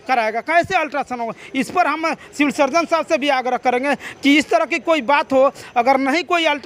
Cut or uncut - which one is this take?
uncut